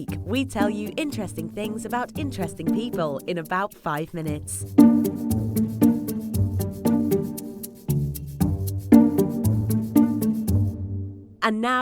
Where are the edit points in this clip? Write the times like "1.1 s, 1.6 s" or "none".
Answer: 2.5 s